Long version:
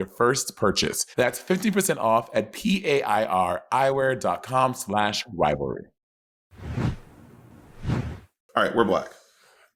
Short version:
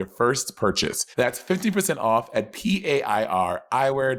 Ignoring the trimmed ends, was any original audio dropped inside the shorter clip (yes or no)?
no